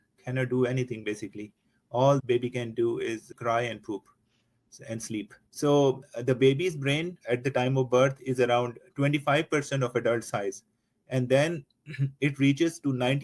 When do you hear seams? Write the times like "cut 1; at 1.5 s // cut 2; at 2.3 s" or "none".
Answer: cut 1; at 5.4 s